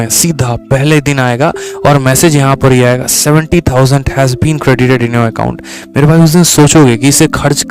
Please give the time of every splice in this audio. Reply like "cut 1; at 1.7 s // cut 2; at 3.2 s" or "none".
none